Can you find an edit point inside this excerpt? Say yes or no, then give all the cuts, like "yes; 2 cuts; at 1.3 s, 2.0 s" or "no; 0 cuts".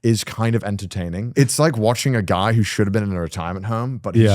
yes; 1 cut; at 1.3 s